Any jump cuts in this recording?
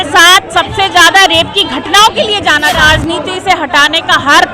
yes; 1 cut; at 2.8 s

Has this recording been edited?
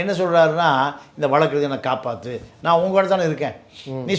no; 0 cuts

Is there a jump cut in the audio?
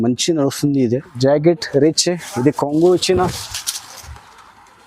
yes; 1 cut; at 1.1 s

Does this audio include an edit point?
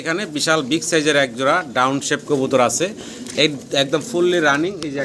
no; 0 cuts

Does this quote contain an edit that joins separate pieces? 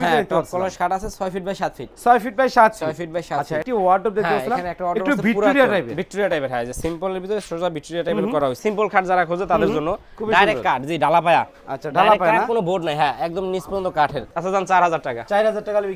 yes; 3 cuts; at 3.6 s, 8.6 s, 14.3 s

